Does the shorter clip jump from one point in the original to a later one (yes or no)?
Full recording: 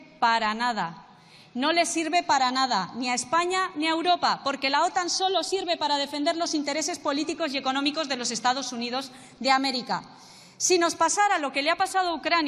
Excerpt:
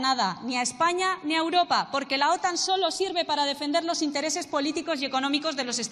no